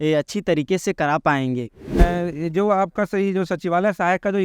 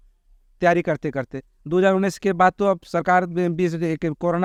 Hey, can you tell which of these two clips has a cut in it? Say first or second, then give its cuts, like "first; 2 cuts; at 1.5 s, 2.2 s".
first; 1 cut; at 2.0 s